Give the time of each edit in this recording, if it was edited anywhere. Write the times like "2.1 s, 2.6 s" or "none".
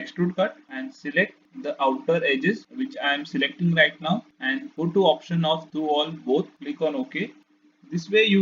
1.5 s

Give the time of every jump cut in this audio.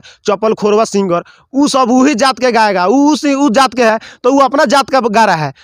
none

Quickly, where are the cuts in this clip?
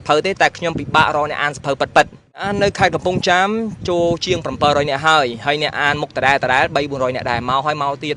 2.5 s

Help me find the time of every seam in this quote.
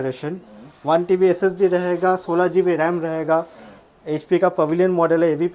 none

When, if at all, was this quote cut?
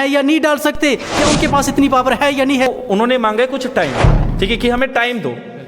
2.8 s

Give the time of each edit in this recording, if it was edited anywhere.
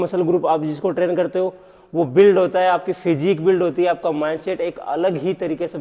none

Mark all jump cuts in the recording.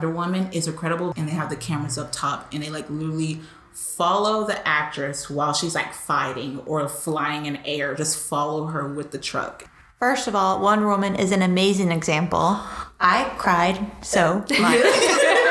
1.1 s, 9.6 s

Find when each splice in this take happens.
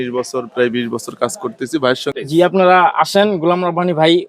2.1 s

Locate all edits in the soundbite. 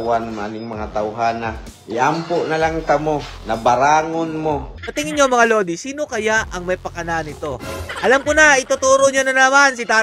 4.7 s

